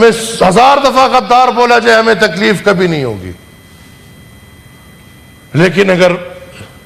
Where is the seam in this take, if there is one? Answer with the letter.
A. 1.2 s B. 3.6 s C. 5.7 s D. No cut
D